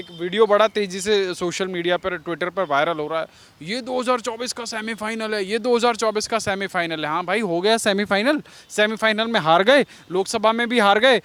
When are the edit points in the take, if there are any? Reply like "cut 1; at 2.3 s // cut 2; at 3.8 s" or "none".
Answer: none

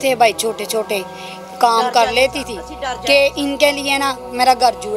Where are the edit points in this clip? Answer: none

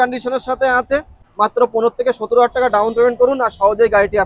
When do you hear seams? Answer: cut 1; at 1.2 s

